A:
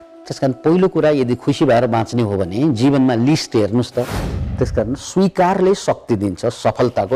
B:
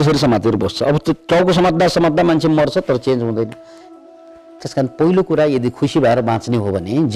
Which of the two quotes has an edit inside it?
A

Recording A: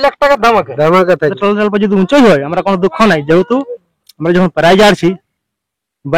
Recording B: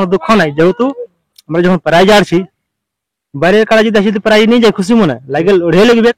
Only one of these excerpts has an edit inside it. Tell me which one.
A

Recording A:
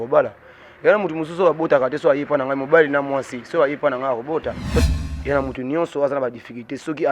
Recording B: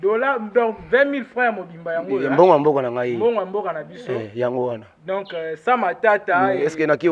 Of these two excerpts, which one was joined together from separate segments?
A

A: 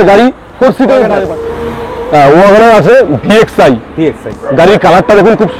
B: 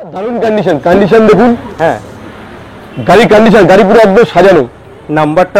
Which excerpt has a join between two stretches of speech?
A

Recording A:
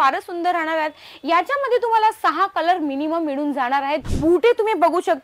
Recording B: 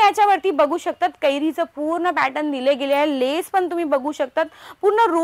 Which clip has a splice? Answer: A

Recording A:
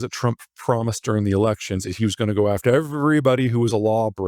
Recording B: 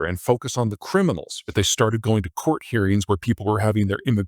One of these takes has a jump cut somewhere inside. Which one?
B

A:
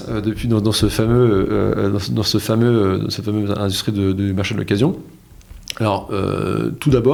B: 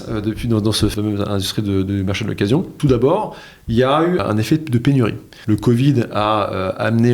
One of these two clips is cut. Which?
B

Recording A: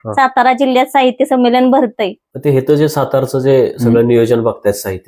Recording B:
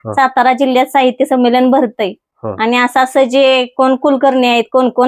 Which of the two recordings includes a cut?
A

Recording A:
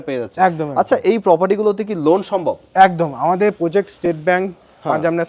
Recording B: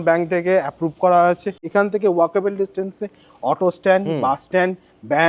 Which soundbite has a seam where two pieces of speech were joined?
B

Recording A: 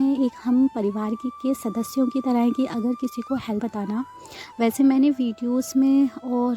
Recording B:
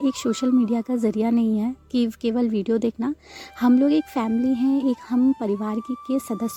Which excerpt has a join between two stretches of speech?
A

